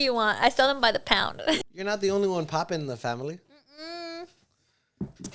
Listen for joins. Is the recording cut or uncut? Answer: cut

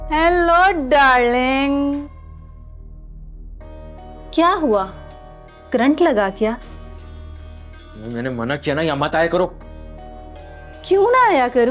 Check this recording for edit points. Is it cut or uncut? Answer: uncut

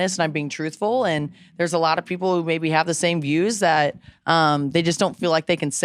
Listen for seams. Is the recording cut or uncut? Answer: uncut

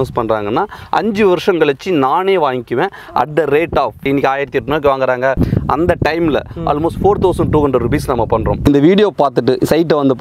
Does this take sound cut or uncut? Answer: cut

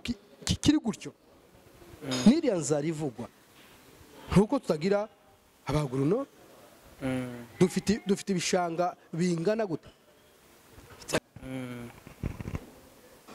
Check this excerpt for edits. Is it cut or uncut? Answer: cut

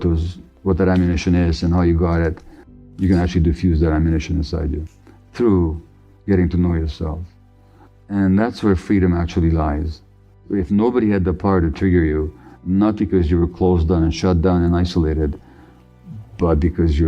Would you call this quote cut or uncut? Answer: cut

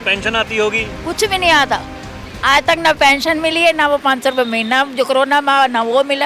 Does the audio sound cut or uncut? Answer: uncut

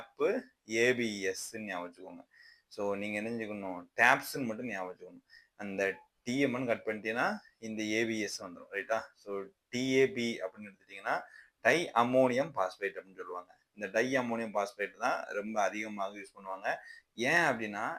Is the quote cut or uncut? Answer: uncut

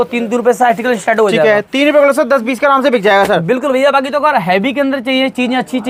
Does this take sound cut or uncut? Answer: uncut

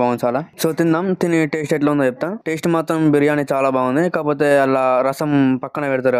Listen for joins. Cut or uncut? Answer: uncut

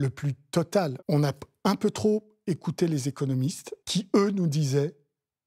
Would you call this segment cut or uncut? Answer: cut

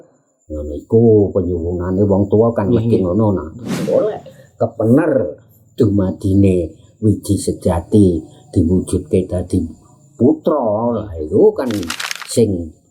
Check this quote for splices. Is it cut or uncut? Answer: cut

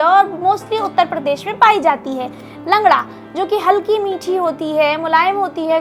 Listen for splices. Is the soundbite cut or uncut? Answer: uncut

